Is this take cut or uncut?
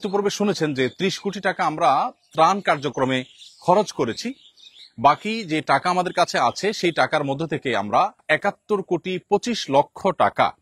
cut